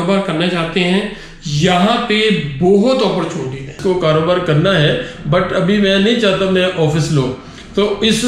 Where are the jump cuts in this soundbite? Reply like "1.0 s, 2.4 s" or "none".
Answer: 3.8 s